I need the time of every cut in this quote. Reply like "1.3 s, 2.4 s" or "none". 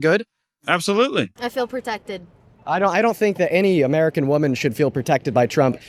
none